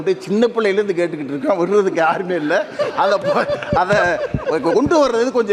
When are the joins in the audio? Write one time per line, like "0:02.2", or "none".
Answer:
none